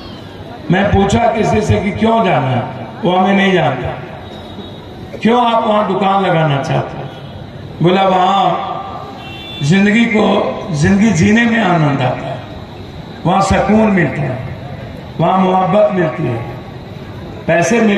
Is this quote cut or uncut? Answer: uncut